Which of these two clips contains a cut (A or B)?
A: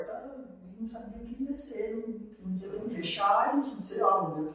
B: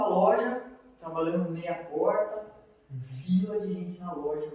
A